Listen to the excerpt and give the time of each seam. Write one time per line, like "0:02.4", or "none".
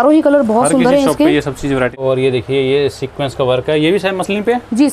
0:02.0